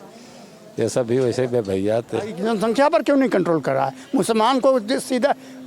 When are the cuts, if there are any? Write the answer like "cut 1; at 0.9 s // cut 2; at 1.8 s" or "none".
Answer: cut 1; at 2.4 s